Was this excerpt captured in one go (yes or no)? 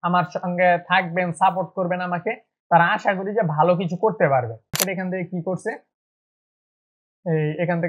no